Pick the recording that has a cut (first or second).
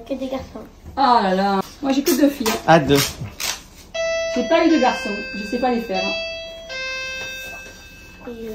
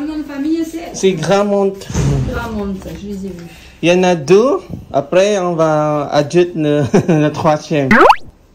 first